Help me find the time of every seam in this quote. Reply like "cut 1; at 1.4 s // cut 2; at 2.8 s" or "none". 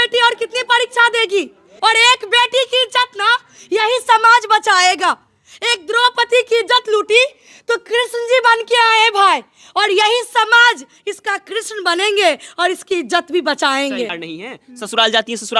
cut 1; at 1.7 s // cut 2; at 14.2 s